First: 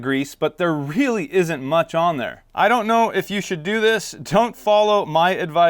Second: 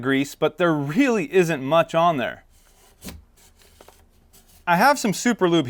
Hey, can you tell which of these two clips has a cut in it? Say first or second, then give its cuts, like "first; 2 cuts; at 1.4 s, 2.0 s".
first; 1 cut; at 2.4 s